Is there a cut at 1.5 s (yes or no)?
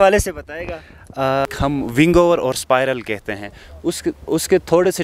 yes